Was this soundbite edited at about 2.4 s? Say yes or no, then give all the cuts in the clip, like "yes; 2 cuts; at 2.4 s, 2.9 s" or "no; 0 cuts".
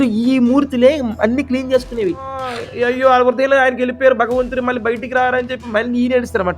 yes; 1 cut; at 2.4 s